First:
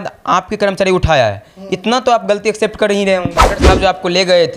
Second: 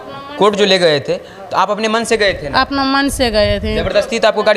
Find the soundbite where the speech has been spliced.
first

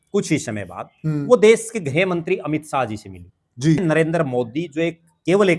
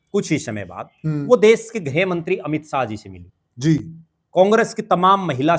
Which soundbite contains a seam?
first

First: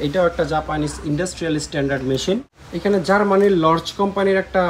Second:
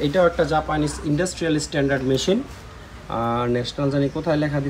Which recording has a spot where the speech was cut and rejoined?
first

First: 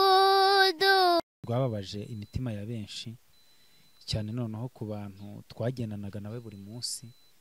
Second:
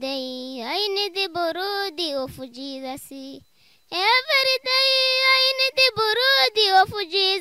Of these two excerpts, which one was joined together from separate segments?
first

